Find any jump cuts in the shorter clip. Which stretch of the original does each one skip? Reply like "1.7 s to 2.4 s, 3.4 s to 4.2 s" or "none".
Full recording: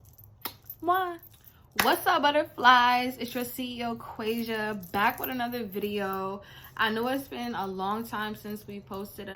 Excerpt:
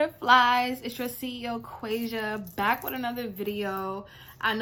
none